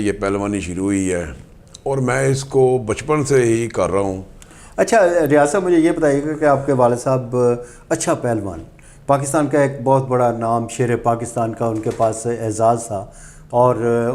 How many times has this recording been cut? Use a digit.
0